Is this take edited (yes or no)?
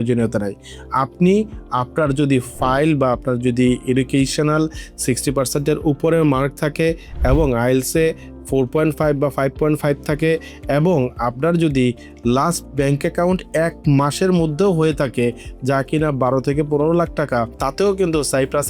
yes